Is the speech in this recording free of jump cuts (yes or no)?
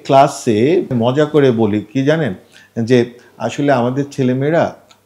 no